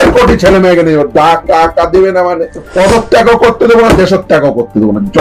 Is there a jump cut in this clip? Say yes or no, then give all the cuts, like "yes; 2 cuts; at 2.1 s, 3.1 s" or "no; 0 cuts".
yes; 1 cut; at 2.6 s